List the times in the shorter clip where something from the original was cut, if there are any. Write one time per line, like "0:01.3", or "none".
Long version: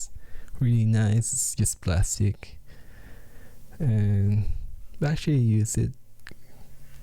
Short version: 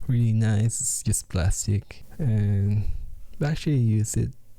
0:02.0